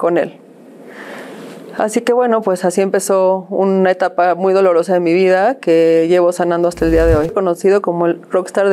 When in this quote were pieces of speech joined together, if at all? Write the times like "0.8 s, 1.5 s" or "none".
7.3 s

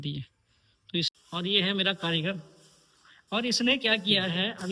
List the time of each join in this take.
1.1 s

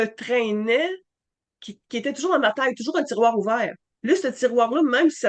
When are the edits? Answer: 3.9 s

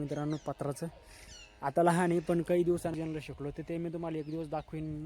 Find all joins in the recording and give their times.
2.9 s

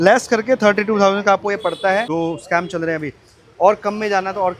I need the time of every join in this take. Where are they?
2.1 s

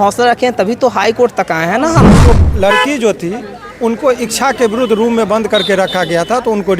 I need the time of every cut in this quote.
2.2 s

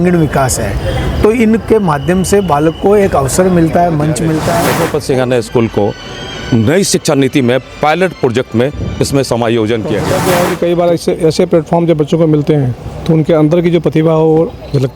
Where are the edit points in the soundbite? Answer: 4.7 s, 10.1 s

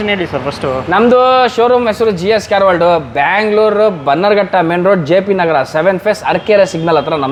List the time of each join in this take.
none

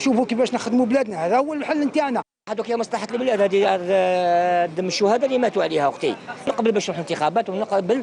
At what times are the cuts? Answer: 2.5 s, 6.5 s

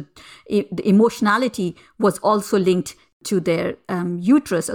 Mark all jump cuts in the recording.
3.2 s

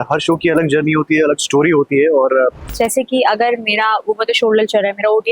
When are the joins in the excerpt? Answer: 2.6 s

